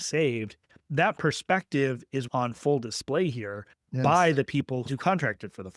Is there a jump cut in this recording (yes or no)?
yes